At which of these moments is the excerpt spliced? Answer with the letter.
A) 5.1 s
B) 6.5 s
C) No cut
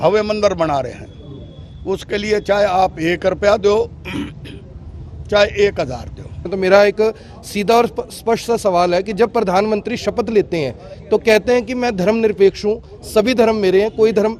B